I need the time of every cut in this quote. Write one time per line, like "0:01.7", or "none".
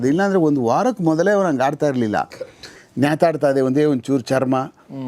0:02.7